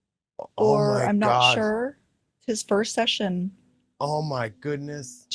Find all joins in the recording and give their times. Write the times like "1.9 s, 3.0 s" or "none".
2.4 s